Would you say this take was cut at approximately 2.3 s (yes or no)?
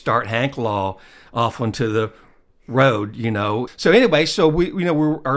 no